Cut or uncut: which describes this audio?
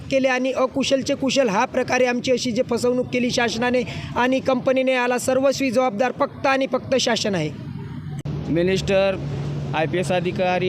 cut